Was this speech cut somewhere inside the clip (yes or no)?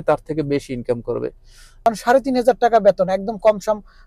yes